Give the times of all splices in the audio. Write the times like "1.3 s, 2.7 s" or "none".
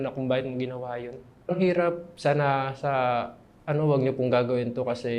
1.5 s